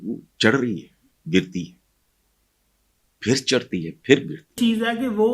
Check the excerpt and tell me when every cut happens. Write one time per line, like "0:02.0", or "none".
0:04.4